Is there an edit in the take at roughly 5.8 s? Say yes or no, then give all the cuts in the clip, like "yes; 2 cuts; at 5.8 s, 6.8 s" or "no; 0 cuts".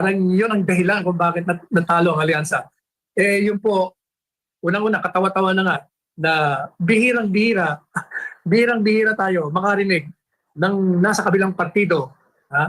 no; 0 cuts